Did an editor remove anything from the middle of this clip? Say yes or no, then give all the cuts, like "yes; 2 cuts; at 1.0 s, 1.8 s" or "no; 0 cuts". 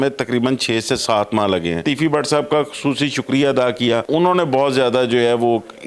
yes; 2 cuts; at 1.8 s, 4.0 s